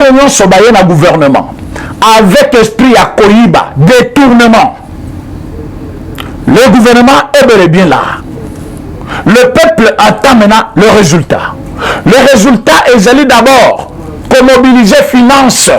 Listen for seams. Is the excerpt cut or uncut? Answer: uncut